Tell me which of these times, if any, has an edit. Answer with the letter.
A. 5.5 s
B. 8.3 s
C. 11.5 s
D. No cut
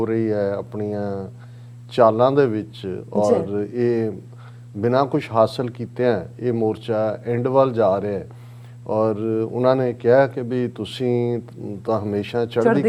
D